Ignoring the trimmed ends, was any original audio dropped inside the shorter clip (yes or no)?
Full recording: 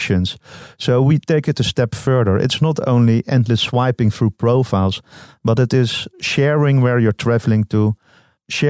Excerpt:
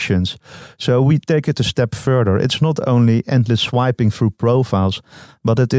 no